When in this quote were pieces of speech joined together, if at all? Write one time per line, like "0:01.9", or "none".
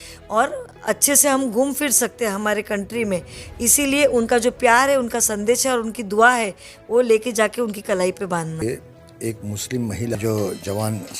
0:08.6
0:10.2